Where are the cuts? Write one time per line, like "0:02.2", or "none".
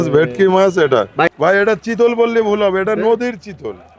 0:01.3